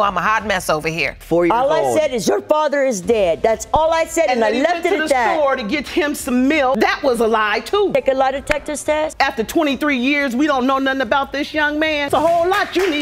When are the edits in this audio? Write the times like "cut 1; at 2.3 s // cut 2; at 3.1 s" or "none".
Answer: cut 1; at 1.1 s // cut 2; at 6.8 s